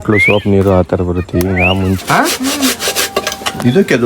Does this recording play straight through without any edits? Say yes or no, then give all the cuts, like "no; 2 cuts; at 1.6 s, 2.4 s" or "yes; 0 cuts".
no; 1 cut; at 2.0 s